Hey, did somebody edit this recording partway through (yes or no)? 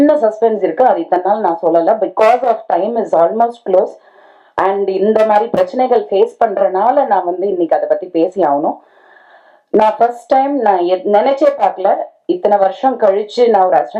no